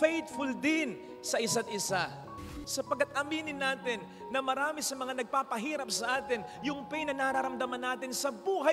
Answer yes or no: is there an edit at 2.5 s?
yes